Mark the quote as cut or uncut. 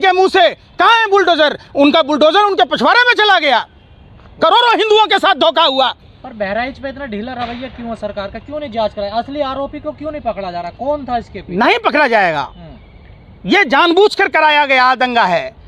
uncut